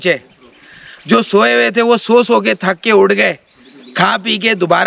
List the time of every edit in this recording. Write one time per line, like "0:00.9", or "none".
none